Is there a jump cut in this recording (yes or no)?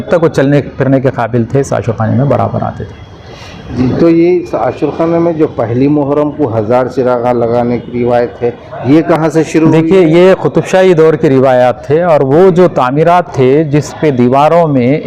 no